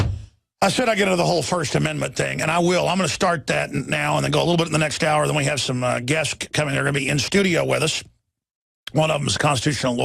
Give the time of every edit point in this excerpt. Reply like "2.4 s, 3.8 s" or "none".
6.7 s